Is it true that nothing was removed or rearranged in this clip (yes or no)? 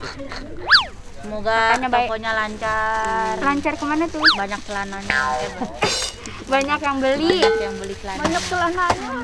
no